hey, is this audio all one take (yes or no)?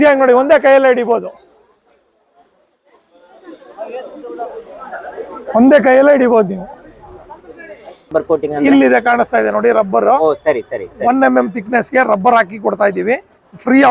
no